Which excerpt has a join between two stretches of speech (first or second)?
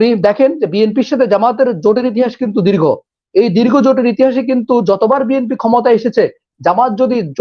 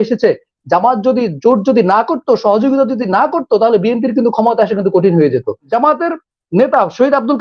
second